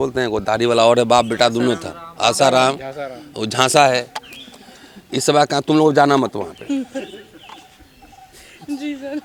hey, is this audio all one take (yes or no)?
yes